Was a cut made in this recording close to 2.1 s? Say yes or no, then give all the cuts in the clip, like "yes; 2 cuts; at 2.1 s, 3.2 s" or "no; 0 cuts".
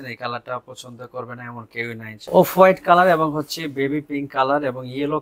yes; 1 cut; at 2.1 s